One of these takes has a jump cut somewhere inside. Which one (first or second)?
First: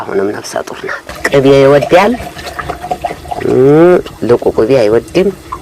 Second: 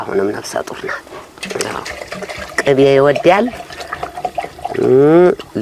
first